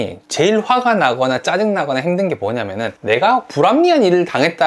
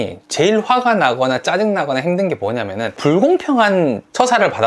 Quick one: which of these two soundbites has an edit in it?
first; 1 cut; at 2.9 s

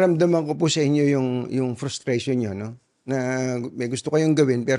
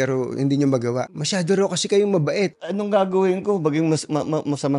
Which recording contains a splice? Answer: second; 2 cuts; at 1.1 s, 2.6 s

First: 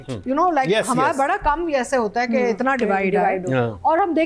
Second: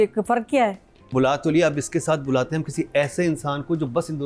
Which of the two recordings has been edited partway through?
second; 1 cut; at 1.1 s

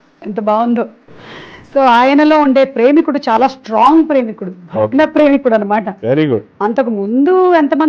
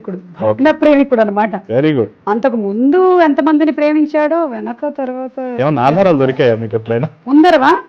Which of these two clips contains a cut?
first; 1 cut; at 1.0 s

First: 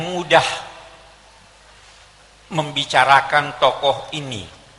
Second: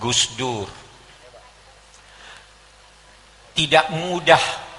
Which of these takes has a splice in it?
second; 1 cut; at 1.2 s

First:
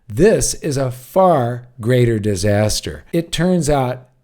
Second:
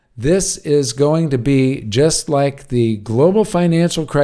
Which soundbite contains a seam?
first; 1 cut; at 2.9 s

